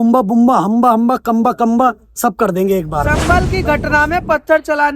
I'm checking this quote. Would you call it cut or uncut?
cut